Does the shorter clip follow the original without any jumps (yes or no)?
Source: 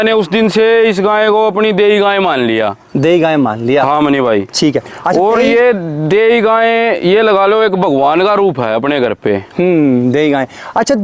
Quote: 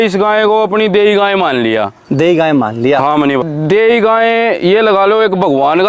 no